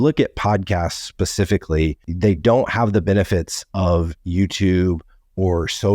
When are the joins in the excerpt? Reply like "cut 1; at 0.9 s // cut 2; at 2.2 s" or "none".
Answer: cut 1; at 2.1 s